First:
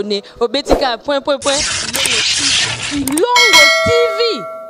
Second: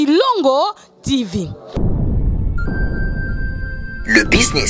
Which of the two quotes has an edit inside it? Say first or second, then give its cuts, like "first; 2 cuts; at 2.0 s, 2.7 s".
second; 1 cut; at 1.8 s